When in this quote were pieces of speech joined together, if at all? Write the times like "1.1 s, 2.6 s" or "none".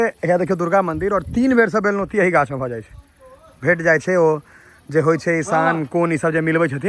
none